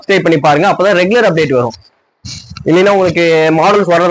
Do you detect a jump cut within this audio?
no; 0 cuts

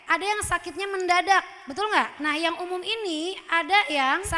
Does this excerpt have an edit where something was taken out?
yes; 1 cut; at 2.1 s

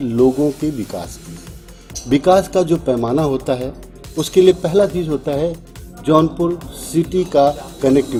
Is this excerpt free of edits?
yes; 0 cuts

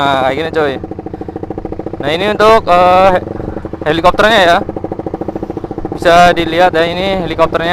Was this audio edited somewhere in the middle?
no; 0 cuts

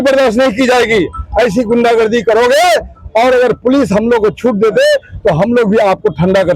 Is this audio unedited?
yes; 0 cuts

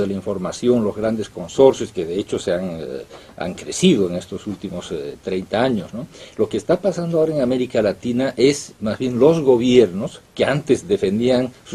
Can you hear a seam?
yes; 1 cut; at 5.9 s

